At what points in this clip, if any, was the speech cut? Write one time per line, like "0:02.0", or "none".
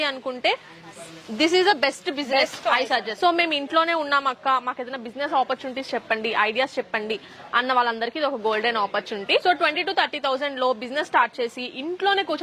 0:03.2
0:09.4